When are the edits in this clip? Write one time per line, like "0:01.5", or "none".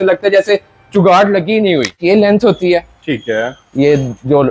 0:02.0